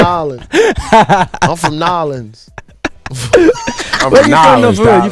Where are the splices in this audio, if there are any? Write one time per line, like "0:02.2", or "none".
0:02.3

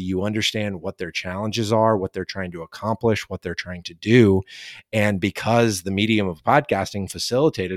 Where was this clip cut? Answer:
none

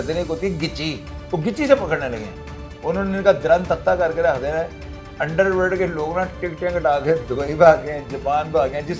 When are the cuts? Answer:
none

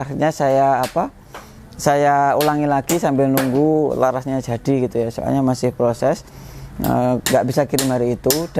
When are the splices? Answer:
none

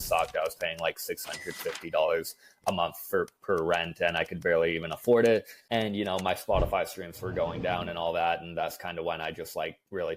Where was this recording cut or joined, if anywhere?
0:05.6

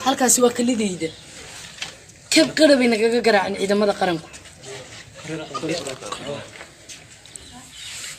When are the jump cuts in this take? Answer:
0:05.7

